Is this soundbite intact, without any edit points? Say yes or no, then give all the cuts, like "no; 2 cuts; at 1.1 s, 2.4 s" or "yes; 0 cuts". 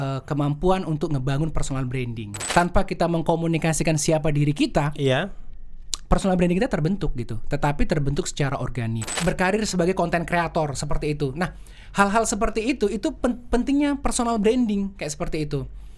no; 2 cuts; at 2.5 s, 9.1 s